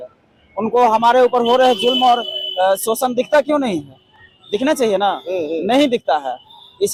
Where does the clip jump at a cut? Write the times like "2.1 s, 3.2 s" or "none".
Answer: none